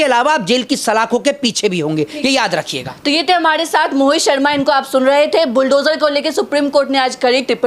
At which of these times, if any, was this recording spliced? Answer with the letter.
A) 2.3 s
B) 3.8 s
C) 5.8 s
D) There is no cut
D